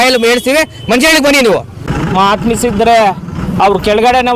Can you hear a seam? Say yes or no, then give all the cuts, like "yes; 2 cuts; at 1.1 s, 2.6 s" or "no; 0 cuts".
yes; 1 cut; at 1.8 s